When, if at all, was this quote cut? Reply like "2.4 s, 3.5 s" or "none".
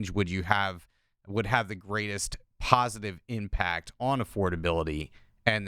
none